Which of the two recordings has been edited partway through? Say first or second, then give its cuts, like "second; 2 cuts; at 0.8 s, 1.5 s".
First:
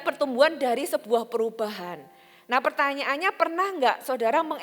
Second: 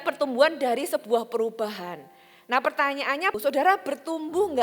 second; 1 cut; at 3.3 s